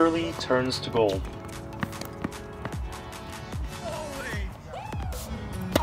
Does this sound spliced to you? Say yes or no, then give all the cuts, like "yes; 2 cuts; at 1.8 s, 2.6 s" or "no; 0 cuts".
no; 0 cuts